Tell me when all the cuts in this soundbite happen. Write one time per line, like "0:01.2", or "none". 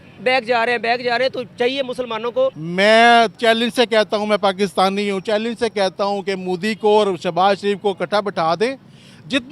0:02.6